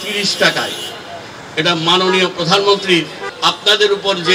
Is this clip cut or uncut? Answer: cut